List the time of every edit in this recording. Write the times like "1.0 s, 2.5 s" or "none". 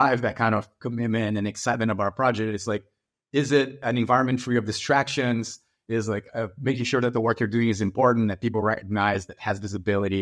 3.8 s